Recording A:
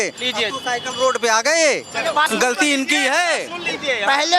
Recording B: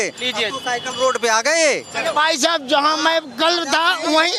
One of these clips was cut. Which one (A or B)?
A